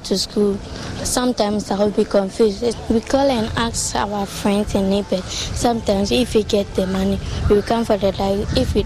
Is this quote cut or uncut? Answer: cut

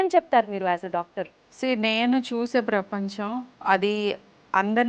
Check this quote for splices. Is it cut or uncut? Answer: cut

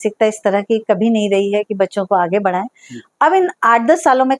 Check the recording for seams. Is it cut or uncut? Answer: uncut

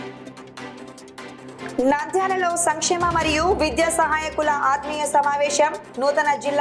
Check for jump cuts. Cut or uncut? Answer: cut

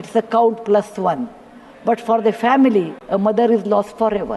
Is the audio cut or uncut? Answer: cut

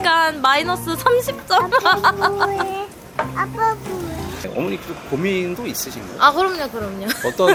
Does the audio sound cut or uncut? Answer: uncut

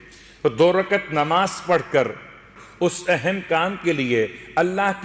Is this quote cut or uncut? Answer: cut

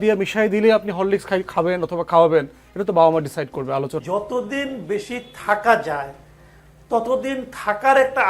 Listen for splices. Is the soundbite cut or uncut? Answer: cut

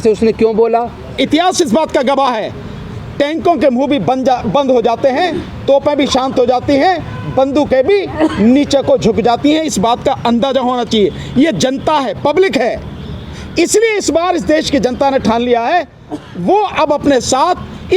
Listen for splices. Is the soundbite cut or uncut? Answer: cut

